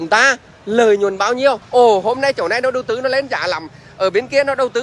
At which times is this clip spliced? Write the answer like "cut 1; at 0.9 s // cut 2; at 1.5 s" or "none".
cut 1; at 1.6 s